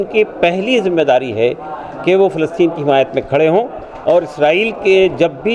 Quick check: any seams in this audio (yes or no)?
no